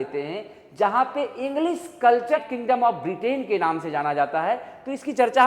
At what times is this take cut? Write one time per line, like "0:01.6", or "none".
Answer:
0:02.4